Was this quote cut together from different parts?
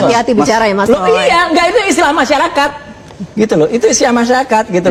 no; 0 cuts

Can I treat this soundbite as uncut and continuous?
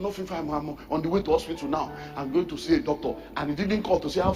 yes; 0 cuts

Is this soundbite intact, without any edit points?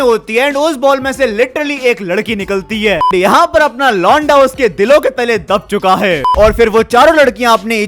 no; 2 cuts; at 3.1 s, 6.3 s

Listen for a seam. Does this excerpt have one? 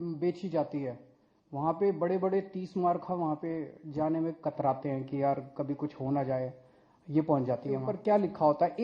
yes; 1 cut; at 7.9 s

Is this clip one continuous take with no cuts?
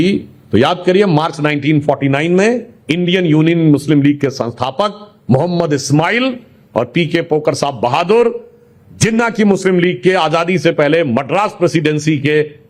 yes; 0 cuts

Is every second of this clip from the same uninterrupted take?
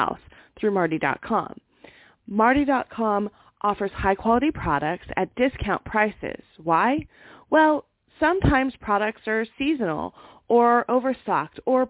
yes; 0 cuts

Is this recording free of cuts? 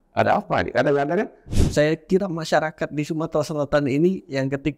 no; 1 cut; at 1.4 s

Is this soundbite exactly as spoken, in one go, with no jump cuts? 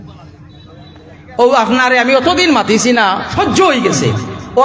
no; 1 cut; at 3.3 s

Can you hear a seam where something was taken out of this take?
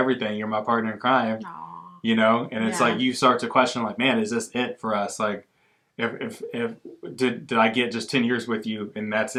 no; 0 cuts

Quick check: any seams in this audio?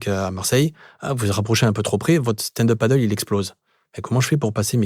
no; 0 cuts

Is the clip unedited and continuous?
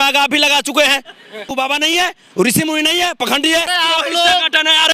no; 2 cuts; at 1.5 s, 3.7 s

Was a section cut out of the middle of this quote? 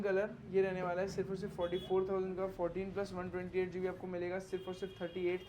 no; 0 cuts

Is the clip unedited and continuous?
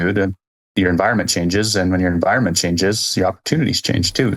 yes; 0 cuts

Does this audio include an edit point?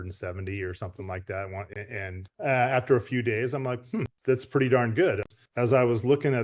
yes; 2 cuts; at 1.7 s, 5.3 s

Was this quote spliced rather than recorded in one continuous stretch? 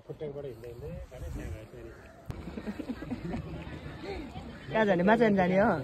yes; 1 cut; at 2.3 s

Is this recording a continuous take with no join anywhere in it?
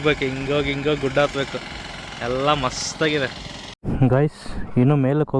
no; 1 cut; at 3.8 s

